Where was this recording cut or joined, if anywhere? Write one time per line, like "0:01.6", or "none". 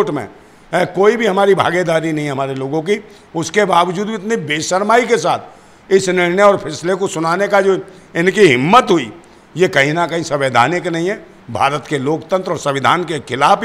none